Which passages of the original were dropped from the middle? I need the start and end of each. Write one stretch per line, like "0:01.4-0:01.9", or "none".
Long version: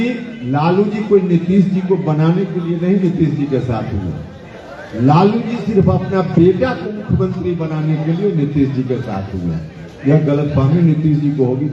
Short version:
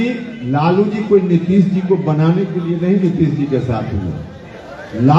none